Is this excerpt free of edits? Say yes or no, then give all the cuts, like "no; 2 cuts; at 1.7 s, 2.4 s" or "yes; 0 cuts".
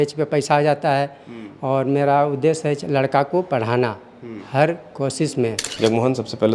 no; 1 cut; at 5.6 s